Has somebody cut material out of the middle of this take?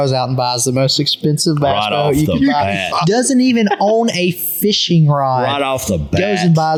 no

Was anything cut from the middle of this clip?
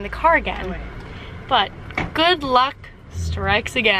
no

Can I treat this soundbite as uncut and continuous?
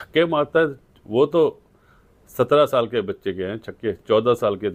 yes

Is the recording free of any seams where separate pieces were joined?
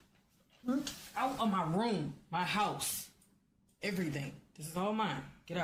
yes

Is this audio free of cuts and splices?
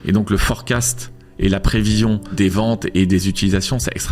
no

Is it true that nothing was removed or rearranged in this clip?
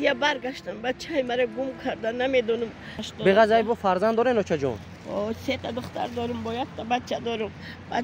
no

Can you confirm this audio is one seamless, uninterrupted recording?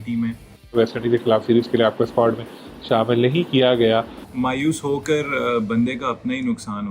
no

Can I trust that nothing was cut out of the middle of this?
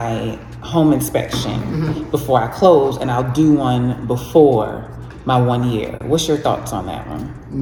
yes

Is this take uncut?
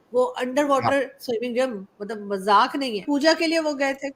no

